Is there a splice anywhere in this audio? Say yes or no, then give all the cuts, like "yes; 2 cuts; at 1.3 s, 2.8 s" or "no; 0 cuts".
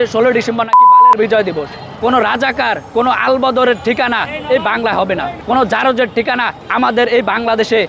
yes; 4 cuts; at 1.8 s, 2.8 s, 5.3 s, 6.6 s